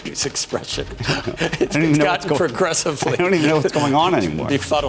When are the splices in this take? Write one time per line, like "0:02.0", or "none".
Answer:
none